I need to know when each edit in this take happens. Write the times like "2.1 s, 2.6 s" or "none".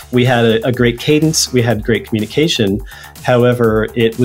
none